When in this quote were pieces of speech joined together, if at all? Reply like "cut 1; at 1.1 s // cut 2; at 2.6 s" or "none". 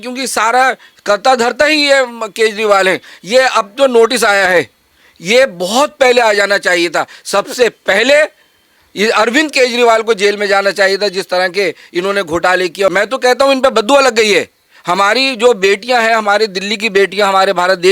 cut 1; at 12.9 s

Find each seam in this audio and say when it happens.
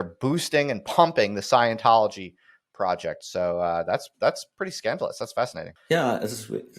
cut 1; at 5.7 s

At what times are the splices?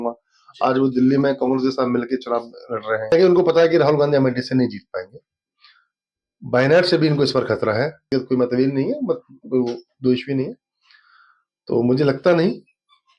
cut 1; at 3.1 s // cut 2; at 8.1 s

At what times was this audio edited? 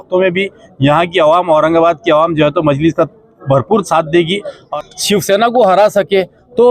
cut 1; at 4.7 s

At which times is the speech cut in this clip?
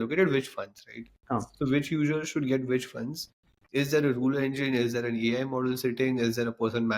none

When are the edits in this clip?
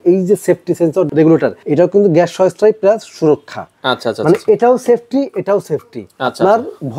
cut 1; at 1.2 s

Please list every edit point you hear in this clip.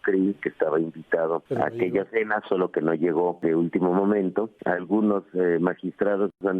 cut 1; at 1.5 s // cut 2; at 3.4 s // cut 3; at 4.5 s

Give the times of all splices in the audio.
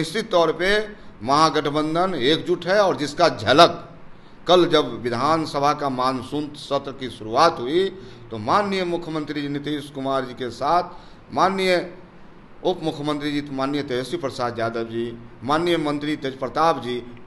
none

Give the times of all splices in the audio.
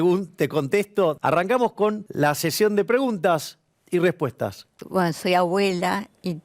cut 1; at 1.2 s // cut 2; at 2.1 s // cut 3; at 4.8 s

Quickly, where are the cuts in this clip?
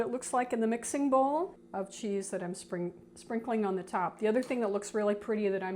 cut 1; at 1.6 s

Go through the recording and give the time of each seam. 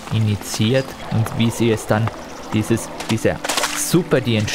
cut 1; at 1.0 s

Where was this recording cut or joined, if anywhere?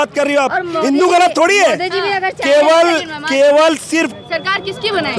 cut 1; at 4.1 s

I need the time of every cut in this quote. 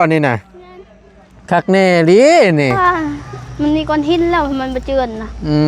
cut 1; at 2.7 s

